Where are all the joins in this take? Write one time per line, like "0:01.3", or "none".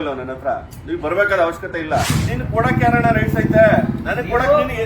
0:02.1